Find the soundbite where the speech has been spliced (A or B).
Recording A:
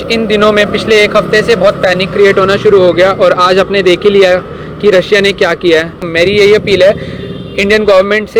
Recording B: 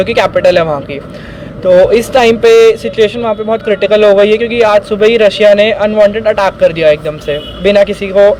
A